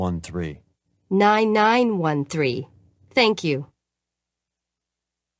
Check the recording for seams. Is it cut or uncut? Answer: cut